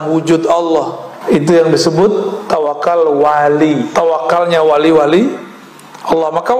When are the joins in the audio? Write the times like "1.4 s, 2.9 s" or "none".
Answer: 1.1 s, 3.9 s